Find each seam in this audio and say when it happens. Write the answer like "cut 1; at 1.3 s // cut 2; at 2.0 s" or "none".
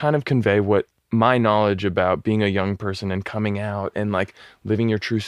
cut 1; at 1.0 s